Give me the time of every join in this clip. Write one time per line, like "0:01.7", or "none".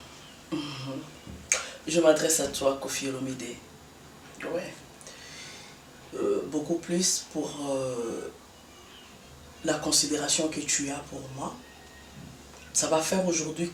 none